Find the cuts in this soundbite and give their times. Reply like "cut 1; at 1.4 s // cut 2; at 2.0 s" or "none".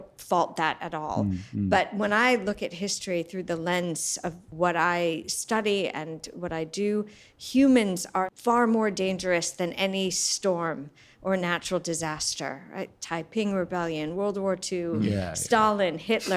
cut 1; at 4.4 s // cut 2; at 8.3 s